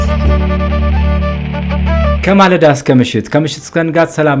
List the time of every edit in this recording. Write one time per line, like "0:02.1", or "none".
0:02.2